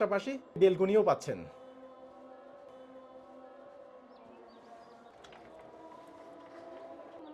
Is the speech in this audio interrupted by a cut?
yes; 1 cut; at 5.1 s

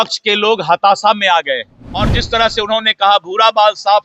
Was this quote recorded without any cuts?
no; 1 cut; at 2.2 s

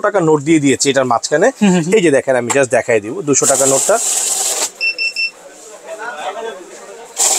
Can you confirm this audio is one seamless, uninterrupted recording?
yes; 0 cuts

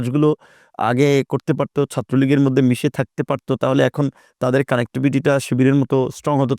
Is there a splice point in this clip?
no; 0 cuts

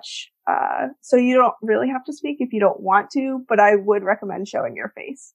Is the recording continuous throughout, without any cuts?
yes; 0 cuts

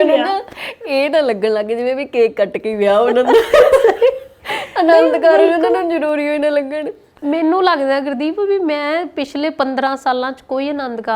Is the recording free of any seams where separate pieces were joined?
yes; 0 cuts

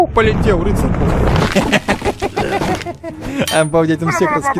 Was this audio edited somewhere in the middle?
no; 0 cuts

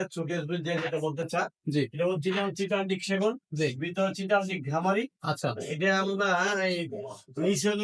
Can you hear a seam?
no; 0 cuts

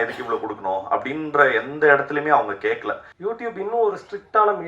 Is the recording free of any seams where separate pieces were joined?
no; 1 cut; at 3.1 s

